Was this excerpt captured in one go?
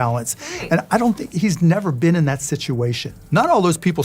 yes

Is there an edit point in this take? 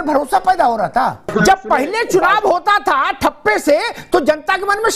yes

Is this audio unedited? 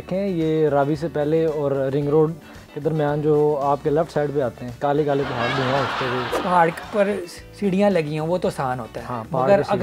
no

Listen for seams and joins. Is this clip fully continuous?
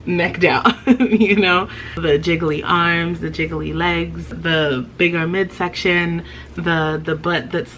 no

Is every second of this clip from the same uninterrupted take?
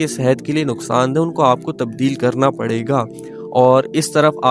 yes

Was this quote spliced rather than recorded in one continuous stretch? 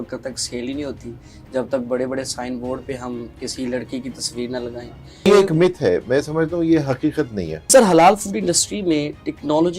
yes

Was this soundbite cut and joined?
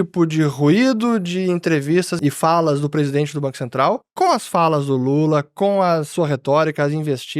yes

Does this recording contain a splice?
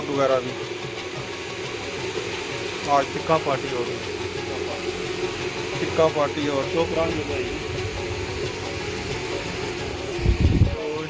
no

